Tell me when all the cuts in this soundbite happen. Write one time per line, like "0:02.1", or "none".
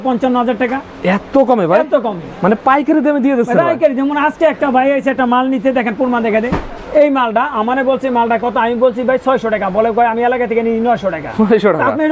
none